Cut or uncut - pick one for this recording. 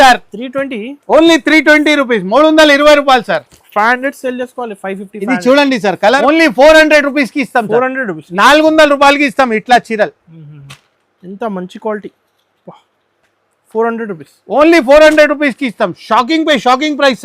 cut